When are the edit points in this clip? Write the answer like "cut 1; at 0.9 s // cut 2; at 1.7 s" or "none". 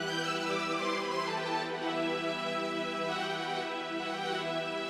none